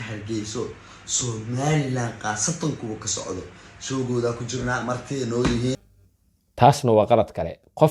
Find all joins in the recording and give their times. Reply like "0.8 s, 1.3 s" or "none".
5.8 s

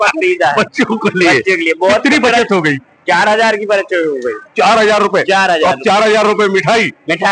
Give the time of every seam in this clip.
none

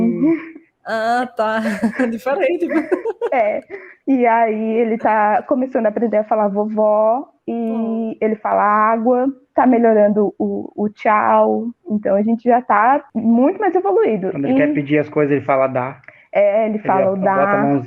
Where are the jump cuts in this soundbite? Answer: 9.4 s, 13.1 s

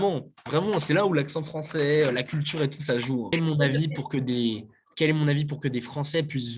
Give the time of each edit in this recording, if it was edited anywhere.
3.3 s

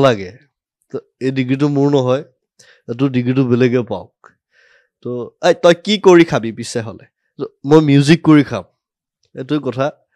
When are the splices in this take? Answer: none

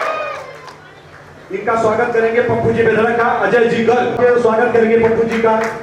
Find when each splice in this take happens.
4.1 s

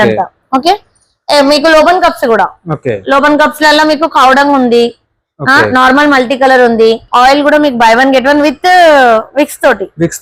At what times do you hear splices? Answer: 7.0 s

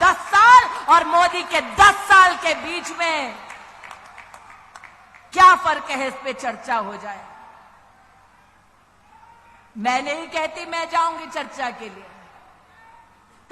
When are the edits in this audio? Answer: none

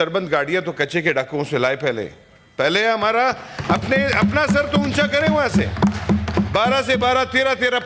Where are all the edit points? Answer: none

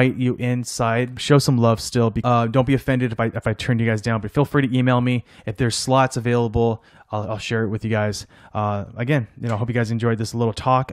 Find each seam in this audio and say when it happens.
1.2 s, 2.2 s

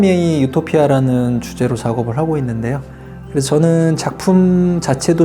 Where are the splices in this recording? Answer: 3.1 s

